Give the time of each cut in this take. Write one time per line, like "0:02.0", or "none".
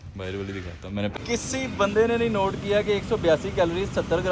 0:01.2